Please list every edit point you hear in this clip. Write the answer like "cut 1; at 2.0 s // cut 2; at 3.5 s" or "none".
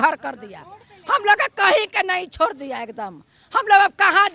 none